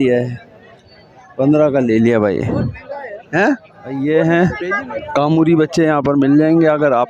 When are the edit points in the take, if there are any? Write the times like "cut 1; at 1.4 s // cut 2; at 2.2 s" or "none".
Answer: cut 1; at 4.0 s